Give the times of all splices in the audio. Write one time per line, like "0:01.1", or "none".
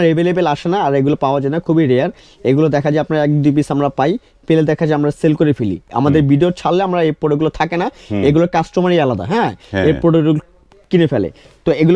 none

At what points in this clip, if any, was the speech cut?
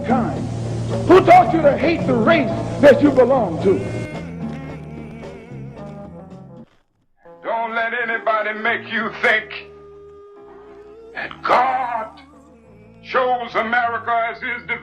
0:06.7

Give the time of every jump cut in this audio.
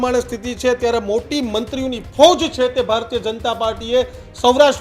none

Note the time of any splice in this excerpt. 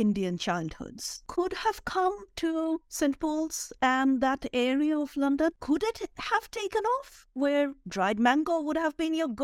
0:01.1
0:05.5

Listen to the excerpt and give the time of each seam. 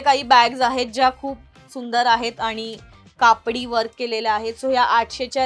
none

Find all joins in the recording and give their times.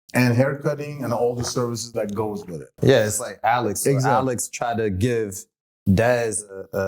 0:02.7

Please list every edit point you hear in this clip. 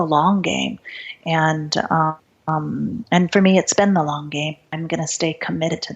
0:02.3
0:04.6

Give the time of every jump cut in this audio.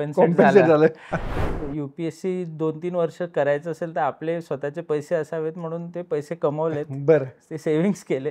0:01.4

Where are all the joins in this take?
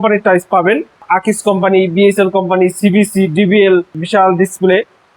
0:01.0
0:03.9

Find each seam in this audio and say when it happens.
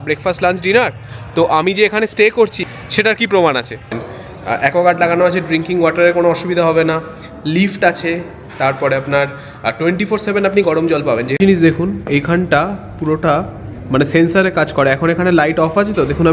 0:02.6
0:04.1
0:11.3

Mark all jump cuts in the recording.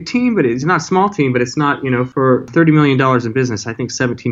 0:02.1

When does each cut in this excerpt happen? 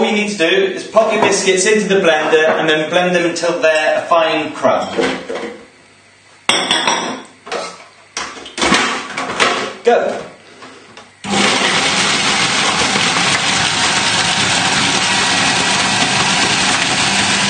none

